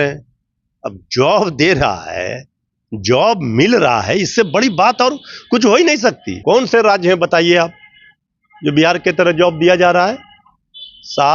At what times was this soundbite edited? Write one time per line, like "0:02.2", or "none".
0:06.3